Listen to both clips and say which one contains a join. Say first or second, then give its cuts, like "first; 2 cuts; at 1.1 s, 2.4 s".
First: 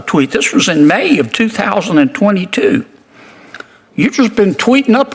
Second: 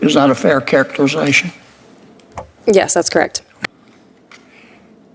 second; 1 cut; at 3.5 s